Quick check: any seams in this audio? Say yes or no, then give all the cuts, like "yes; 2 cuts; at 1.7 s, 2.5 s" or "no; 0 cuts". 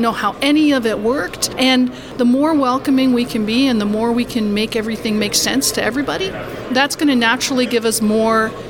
yes; 2 cuts; at 1.4 s, 6.5 s